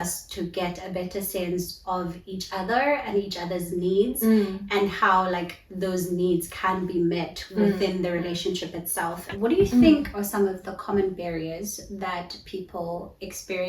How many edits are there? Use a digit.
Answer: 1